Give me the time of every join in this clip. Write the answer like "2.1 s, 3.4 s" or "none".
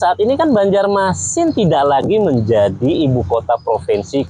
none

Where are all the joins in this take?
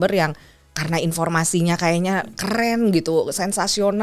none

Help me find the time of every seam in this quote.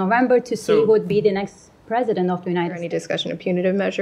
2.9 s

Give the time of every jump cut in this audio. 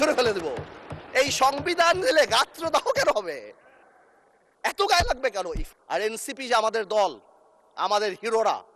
5.6 s

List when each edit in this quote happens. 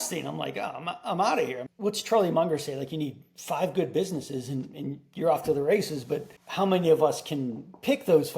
1.6 s, 6.4 s

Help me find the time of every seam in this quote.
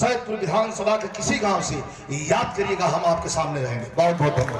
none

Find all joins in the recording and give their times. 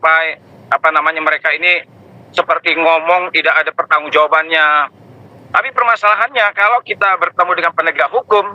5.3 s

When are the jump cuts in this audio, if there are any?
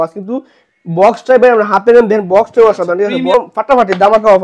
3.3 s

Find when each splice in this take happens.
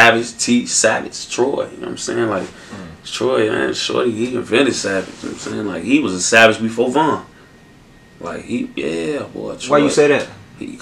none

